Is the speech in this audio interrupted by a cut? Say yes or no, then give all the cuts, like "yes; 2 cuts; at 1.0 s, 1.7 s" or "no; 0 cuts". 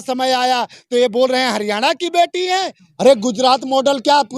yes; 1 cut; at 2.8 s